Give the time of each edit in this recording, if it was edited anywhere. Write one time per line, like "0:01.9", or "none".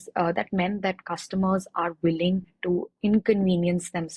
none